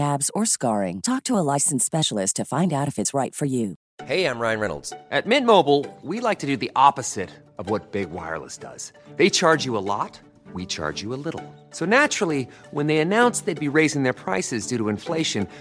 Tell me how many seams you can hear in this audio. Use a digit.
1